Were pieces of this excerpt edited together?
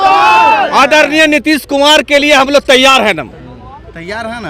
no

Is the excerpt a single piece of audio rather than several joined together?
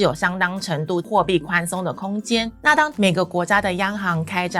no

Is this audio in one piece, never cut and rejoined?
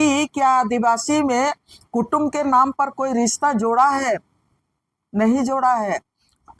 yes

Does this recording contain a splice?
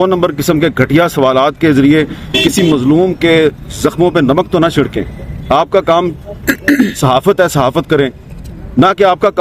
no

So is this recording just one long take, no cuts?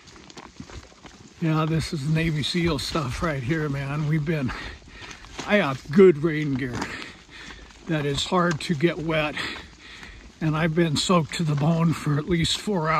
yes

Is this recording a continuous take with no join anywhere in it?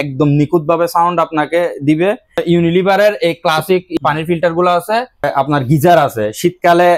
no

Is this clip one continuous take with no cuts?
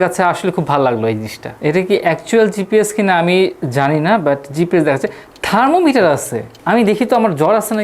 no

